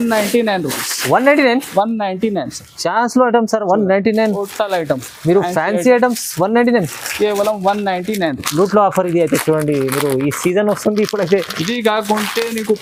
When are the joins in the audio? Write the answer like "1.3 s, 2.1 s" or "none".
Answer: none